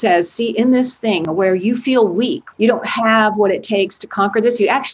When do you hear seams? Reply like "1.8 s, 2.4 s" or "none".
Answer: 1.2 s, 2.4 s